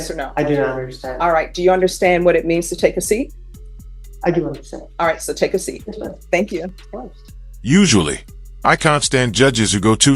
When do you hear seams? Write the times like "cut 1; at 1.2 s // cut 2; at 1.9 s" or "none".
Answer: none